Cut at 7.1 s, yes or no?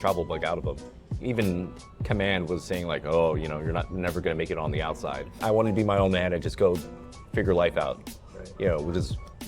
no